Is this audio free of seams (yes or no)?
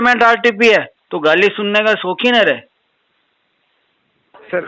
no